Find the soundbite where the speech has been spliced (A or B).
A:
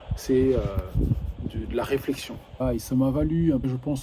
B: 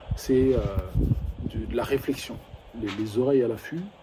A